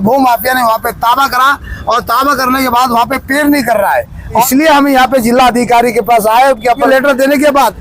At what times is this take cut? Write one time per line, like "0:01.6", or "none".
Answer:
0:04.5
0:06.8